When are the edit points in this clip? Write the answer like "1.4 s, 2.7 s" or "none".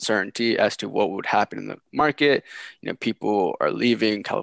none